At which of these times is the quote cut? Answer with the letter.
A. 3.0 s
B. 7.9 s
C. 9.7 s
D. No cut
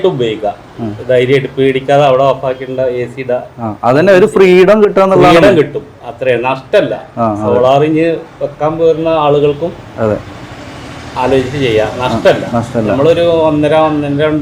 D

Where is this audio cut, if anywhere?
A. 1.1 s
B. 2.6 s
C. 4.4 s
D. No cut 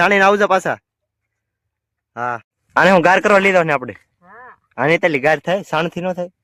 B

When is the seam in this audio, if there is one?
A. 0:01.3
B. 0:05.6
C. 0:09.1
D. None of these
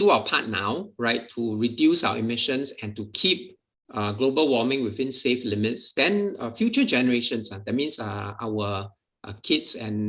A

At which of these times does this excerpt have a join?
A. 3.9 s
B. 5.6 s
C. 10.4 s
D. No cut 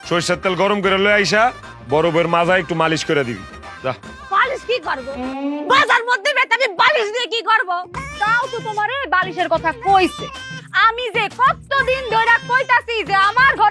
D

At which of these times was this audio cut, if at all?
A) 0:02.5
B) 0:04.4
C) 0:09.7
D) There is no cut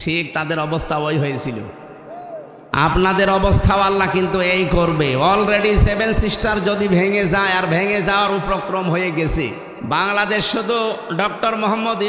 C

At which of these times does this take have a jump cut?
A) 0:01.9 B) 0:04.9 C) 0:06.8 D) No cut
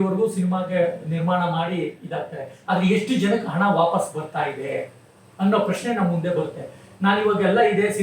D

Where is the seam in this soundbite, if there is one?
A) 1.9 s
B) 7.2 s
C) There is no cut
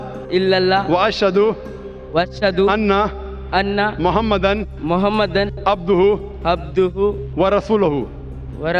C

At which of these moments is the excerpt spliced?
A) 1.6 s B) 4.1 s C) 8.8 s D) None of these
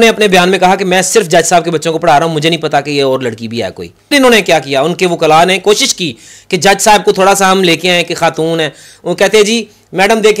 B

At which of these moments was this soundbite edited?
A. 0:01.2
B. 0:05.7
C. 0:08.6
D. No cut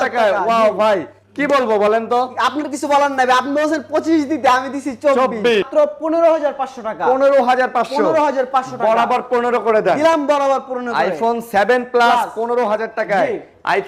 B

